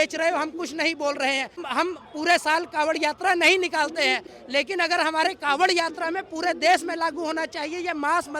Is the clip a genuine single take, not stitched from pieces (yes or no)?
no